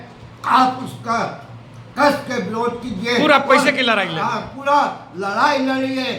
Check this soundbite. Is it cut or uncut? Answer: uncut